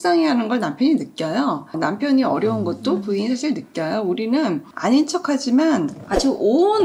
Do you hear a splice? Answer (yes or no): no